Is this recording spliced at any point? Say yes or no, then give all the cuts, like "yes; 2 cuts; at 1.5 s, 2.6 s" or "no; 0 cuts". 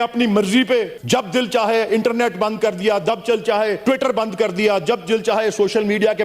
yes; 2 cuts; at 1.0 s, 3.8 s